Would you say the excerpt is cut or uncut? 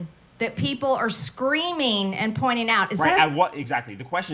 cut